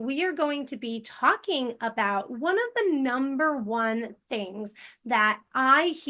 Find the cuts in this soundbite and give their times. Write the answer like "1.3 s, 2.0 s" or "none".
none

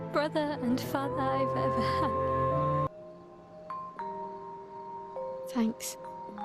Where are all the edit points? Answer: 2.9 s

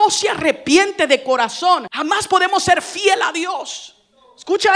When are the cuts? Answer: 1.9 s

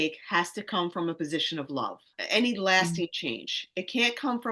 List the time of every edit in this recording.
2.2 s

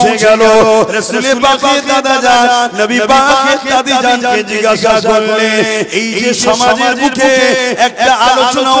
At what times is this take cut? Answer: none

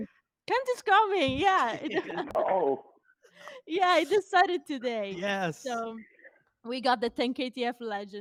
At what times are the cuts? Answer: none

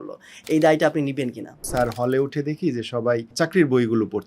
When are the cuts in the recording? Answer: 1.7 s, 3.3 s

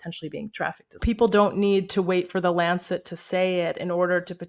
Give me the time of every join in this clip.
1.0 s

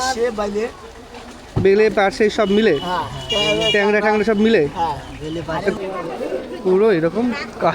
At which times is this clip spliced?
5.8 s

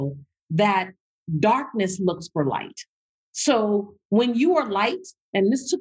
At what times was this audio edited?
none

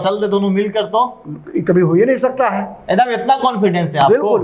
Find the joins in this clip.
none

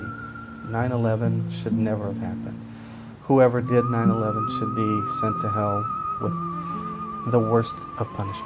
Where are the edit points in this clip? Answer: none

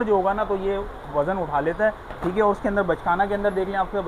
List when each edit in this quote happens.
none

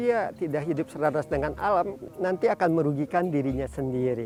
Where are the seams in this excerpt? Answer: none

